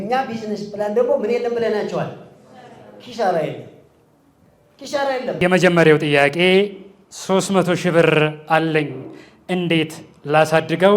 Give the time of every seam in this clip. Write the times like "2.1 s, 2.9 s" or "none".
5.4 s

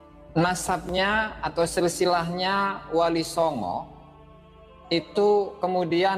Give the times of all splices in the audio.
none

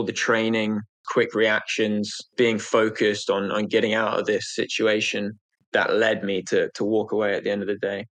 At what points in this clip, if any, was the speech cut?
1.0 s, 2.3 s, 5.6 s

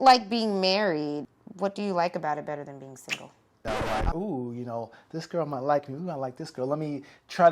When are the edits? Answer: 1.4 s, 3.6 s

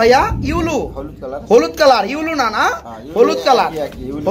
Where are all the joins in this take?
none

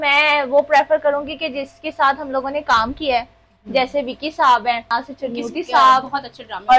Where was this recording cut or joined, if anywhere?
4.9 s

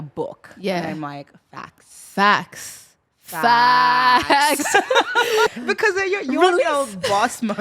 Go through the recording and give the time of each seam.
5.5 s

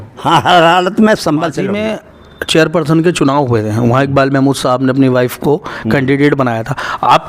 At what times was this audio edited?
1.8 s

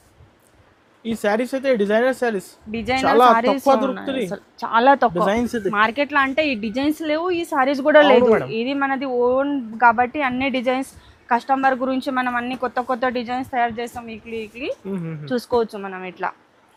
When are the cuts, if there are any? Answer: none

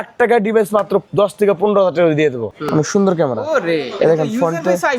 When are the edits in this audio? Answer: 1.1 s, 2.5 s

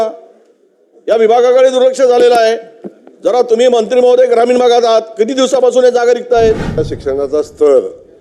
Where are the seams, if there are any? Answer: 6.9 s

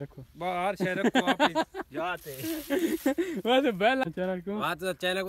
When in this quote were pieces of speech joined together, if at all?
4.0 s

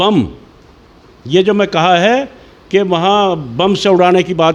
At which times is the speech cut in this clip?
none

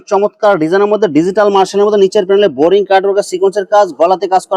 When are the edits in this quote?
none

